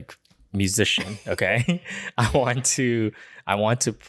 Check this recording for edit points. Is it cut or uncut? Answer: uncut